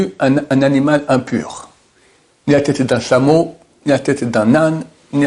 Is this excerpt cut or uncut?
uncut